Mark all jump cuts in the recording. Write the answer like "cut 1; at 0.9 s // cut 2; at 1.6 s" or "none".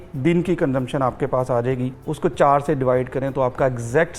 cut 1; at 2.0 s

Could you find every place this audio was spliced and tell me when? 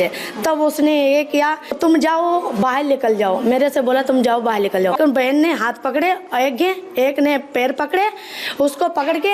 cut 1; at 1.8 s // cut 2; at 4.9 s

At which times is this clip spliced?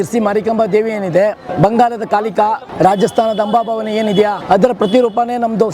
cut 1; at 1.5 s // cut 2; at 2.7 s // cut 3; at 4.4 s

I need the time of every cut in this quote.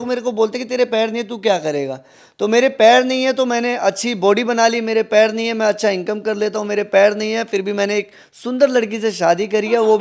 none

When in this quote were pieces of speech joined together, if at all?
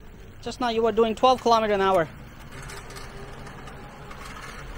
cut 1; at 2.5 s

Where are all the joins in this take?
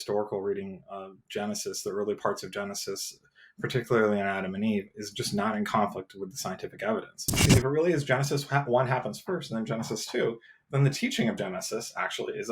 cut 1; at 7.5 s

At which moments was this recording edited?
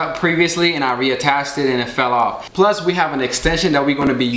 cut 1; at 2.4 s

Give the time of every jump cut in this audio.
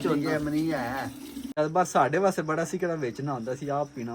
cut 1; at 1.6 s

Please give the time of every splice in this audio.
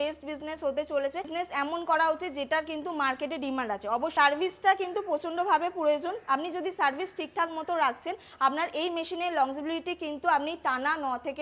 cut 1; at 1.3 s // cut 2; at 4.1 s

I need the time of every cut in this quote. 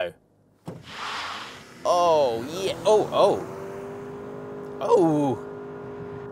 none

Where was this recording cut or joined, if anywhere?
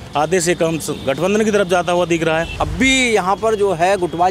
cut 1; at 2.5 s

